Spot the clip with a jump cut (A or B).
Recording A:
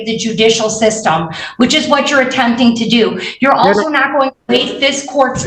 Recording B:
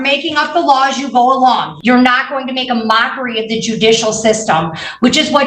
B